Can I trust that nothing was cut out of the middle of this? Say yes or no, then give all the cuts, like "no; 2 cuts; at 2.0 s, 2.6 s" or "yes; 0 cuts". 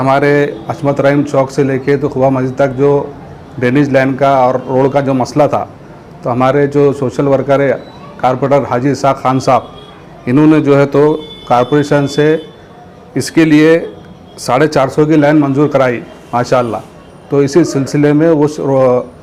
yes; 0 cuts